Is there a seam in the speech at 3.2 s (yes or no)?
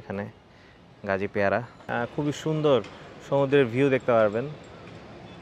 no